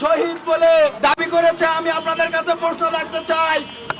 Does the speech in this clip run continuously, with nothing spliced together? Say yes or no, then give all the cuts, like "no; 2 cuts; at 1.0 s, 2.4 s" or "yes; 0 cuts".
no; 1 cut; at 0.9 s